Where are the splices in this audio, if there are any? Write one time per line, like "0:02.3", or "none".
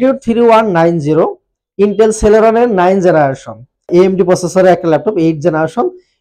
0:03.9